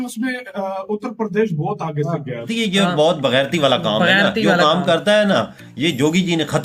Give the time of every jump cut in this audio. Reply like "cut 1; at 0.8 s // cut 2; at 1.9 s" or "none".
cut 1; at 2.5 s